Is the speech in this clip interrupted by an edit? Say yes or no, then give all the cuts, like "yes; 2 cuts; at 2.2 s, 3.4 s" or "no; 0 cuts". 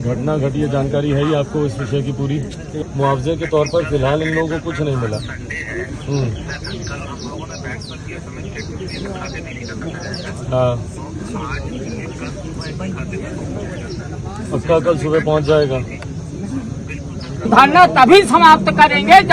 yes; 2 cuts; at 2.9 s, 17.5 s